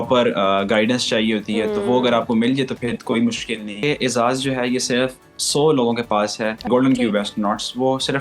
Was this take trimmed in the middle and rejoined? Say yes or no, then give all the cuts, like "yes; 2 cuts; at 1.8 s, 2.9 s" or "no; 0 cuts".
yes; 2 cuts; at 3.8 s, 6.7 s